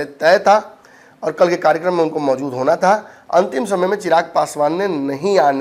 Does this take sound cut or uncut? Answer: uncut